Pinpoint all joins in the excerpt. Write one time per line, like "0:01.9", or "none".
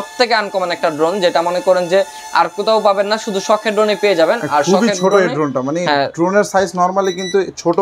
none